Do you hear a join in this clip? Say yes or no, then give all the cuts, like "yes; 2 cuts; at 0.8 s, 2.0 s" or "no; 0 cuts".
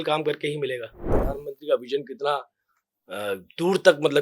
yes; 1 cut; at 1.2 s